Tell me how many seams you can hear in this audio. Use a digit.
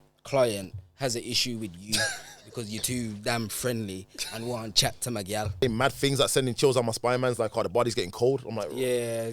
1